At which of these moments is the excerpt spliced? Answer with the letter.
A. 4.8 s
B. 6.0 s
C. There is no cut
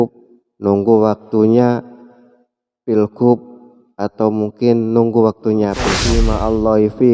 B